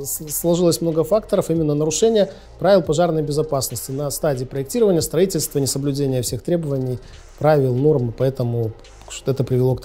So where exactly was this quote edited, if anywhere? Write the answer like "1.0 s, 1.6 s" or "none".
none